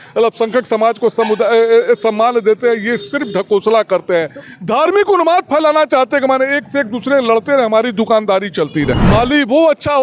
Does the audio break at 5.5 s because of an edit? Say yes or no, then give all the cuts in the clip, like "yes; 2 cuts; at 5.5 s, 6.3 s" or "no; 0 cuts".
no; 1 cut; at 8.9 s